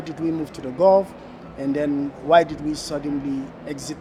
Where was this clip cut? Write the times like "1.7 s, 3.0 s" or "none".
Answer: none

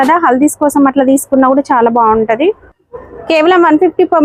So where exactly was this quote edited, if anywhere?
none

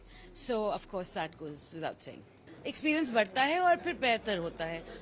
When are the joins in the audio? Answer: 2.4 s

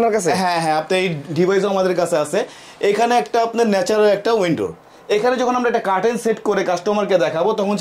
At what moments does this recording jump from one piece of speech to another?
none

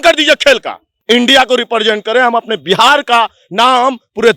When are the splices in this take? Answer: 0.9 s

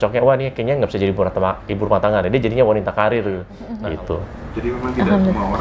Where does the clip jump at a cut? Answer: 3.6 s

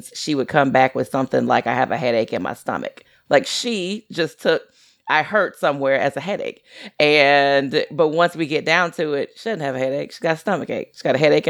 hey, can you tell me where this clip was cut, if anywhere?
none

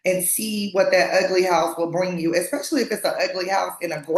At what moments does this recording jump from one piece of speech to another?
none

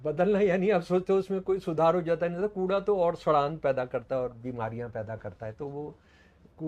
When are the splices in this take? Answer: none

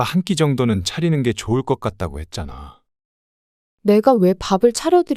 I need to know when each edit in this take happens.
3.3 s

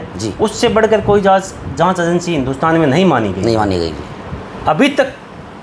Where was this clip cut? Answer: none

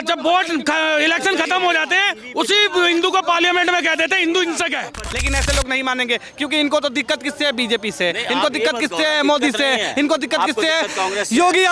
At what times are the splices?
5.1 s

